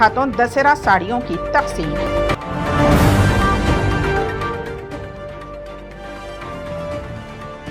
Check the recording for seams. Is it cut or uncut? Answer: uncut